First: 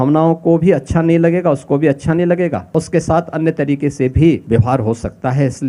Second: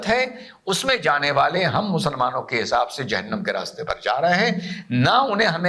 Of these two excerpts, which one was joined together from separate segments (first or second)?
first